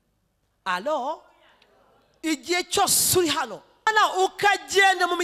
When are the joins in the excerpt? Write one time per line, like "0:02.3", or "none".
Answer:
0:03.9